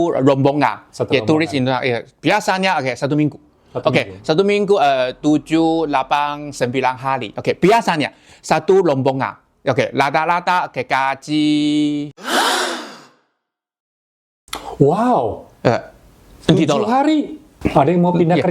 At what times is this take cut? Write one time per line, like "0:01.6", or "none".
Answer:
0:17.4